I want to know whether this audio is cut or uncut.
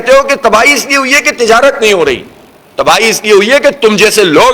uncut